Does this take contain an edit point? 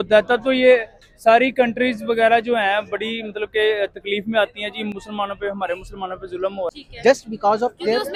no; 0 cuts

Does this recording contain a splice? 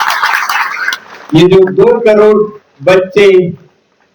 no; 0 cuts

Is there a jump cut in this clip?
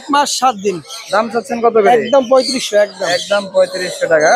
no; 0 cuts

